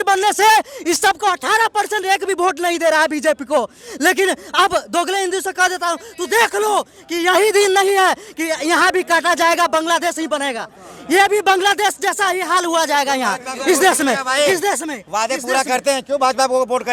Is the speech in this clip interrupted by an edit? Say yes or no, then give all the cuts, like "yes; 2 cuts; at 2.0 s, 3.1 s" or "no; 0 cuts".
no; 0 cuts